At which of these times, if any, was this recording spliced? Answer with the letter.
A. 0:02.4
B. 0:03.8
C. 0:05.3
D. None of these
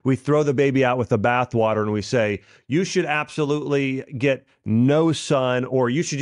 D